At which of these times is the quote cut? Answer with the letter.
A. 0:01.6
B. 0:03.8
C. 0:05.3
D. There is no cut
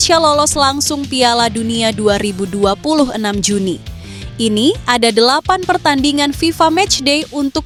D